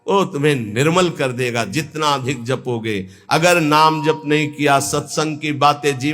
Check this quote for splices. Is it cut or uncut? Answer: uncut